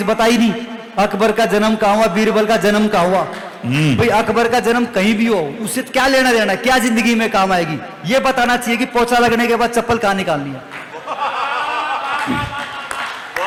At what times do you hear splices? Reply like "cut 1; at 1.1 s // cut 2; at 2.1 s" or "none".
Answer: none